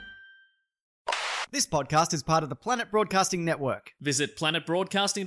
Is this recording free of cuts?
no; 1 cut; at 1.2 s

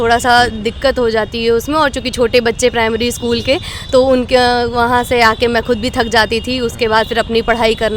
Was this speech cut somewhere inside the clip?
no; 0 cuts

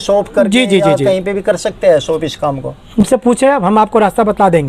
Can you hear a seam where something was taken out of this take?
yes; 1 cut; at 3.0 s

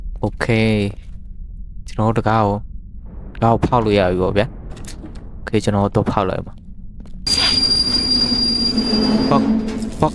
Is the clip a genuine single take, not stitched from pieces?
no; 1 cut; at 7.3 s

